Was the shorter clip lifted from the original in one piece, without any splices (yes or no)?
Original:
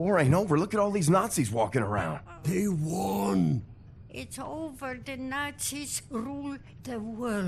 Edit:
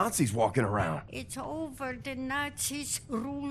no